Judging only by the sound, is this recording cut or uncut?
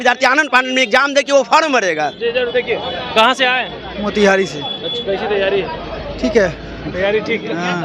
uncut